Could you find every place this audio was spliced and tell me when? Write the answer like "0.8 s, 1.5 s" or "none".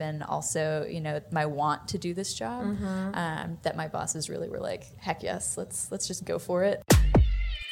6.8 s